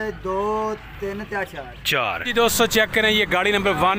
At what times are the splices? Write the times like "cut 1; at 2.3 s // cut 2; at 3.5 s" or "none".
cut 1; at 2.3 s